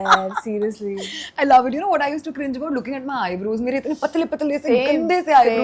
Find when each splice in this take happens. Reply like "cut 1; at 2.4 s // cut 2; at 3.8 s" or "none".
none